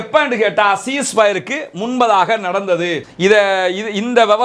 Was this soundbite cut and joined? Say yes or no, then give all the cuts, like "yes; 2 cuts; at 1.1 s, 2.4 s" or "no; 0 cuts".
yes; 1 cut; at 3.0 s